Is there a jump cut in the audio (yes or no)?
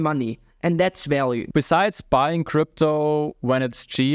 yes